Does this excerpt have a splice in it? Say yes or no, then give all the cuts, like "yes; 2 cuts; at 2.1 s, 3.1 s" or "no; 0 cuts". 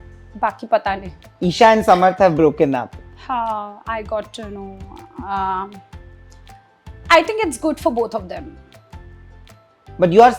no; 0 cuts